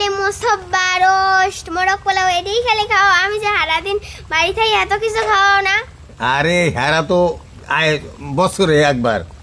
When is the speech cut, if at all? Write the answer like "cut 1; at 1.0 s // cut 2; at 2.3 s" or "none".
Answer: none